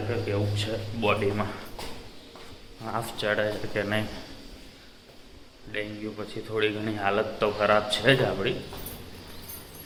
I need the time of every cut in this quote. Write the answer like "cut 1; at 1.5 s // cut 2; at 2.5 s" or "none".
none